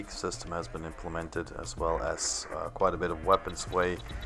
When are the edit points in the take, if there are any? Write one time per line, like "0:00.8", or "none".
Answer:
none